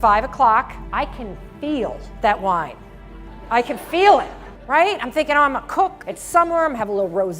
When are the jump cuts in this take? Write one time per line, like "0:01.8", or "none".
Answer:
0:04.5